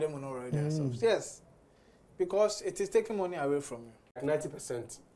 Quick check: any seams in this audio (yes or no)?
yes